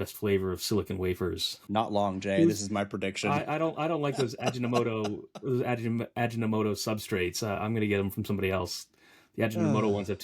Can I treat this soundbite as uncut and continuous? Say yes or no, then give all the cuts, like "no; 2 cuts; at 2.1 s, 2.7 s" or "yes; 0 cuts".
no; 1 cut; at 1.5 s